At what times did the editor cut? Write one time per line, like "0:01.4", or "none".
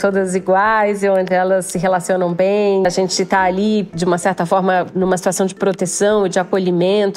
0:02.8